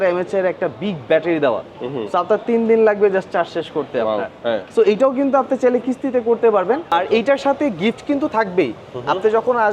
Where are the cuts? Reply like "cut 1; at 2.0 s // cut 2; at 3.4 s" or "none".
cut 1; at 6.9 s